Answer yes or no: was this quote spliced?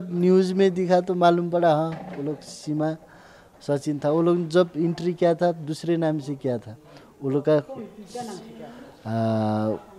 no